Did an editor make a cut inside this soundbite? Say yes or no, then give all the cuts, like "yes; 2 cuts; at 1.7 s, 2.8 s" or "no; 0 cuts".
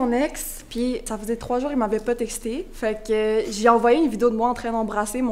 yes; 2 cuts; at 0.9 s, 2.7 s